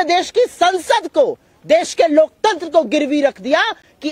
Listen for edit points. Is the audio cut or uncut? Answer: uncut